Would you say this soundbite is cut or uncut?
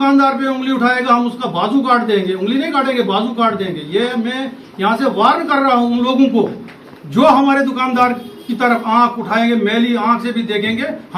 uncut